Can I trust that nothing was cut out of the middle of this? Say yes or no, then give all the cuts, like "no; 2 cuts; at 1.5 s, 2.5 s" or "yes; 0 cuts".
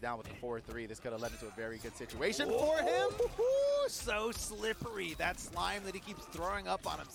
yes; 0 cuts